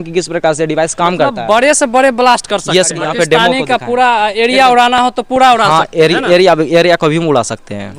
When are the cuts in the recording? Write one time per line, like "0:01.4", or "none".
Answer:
0:02.9